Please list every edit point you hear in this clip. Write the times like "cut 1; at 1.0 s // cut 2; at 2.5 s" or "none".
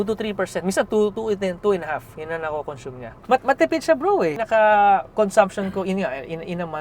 cut 1; at 1.2 s // cut 2; at 3.2 s // cut 3; at 4.4 s